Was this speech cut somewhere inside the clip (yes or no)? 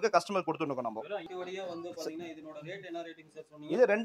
yes